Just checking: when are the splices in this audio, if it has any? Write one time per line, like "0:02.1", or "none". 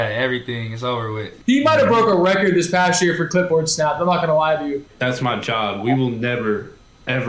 0:01.3
0:04.9